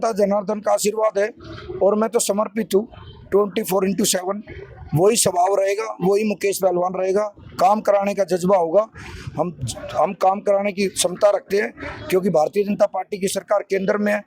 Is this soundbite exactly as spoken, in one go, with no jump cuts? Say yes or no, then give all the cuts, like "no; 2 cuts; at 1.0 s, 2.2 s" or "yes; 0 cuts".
yes; 0 cuts